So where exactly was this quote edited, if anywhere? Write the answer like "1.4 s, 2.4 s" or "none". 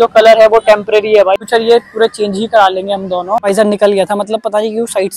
1.4 s, 3.5 s